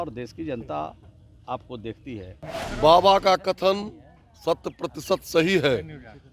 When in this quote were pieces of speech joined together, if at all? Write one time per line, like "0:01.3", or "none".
0:02.5